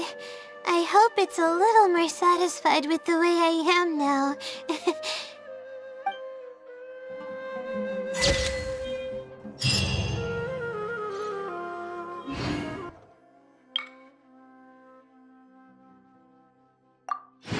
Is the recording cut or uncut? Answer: uncut